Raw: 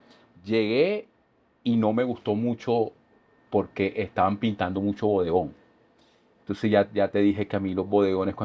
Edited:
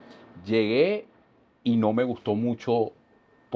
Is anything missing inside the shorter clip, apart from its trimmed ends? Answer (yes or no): no